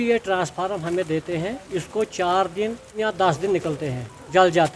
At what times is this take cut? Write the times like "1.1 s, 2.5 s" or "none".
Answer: 3.0 s